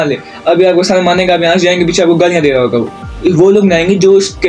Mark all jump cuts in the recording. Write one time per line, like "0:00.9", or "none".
0:03.1

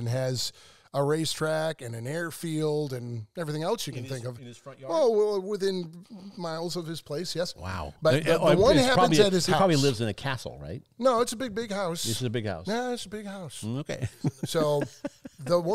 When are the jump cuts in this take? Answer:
none

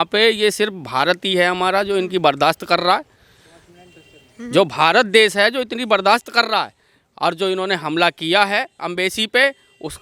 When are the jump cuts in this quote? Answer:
none

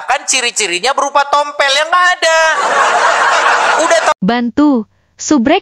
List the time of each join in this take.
0:04.2

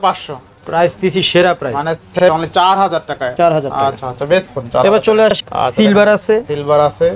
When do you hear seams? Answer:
0:02.2
0:05.3

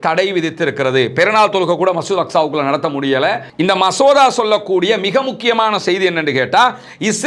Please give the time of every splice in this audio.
0:03.5

